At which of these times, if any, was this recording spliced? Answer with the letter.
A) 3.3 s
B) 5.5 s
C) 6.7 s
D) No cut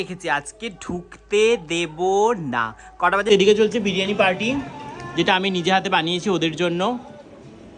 A